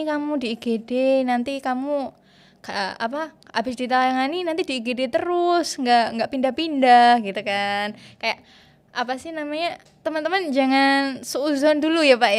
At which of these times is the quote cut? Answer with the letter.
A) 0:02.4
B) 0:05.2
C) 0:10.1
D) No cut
D